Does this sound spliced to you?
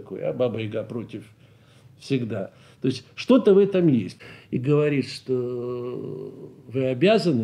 yes; 1 cut; at 4.1 s

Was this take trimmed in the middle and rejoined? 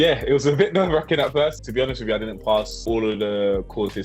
yes; 2 cuts; at 1.6 s, 2.8 s

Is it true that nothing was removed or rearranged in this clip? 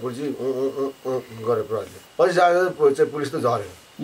no; 1 cut; at 2.0 s

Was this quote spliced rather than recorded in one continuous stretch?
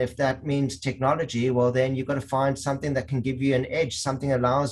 no; 0 cuts

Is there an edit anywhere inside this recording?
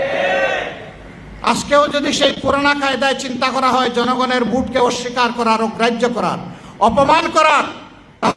no; 0 cuts

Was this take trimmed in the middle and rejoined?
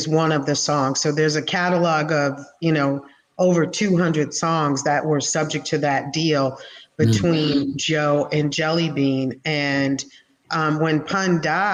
no; 0 cuts

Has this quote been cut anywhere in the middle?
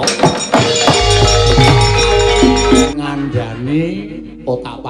yes; 1 cut; at 2.9 s

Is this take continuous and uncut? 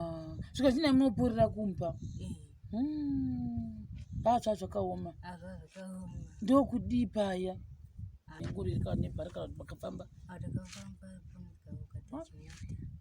no; 1 cut; at 8.4 s

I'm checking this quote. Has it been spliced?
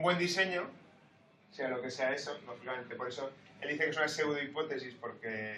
no; 0 cuts

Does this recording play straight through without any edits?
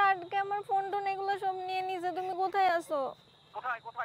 yes; 0 cuts

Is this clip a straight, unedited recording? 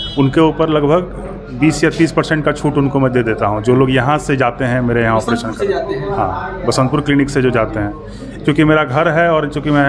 yes; 0 cuts

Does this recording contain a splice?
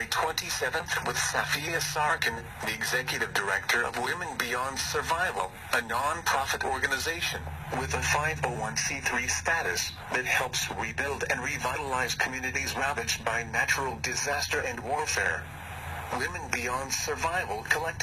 no; 0 cuts

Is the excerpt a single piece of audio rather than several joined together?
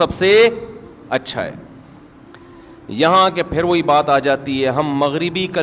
yes; 0 cuts

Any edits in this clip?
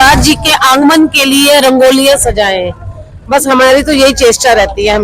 no; 0 cuts

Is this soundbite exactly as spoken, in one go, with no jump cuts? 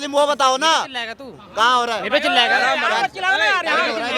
yes; 0 cuts

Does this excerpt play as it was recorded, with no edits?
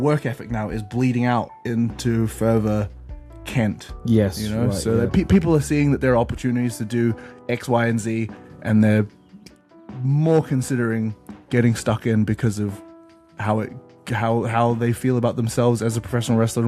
yes; 0 cuts

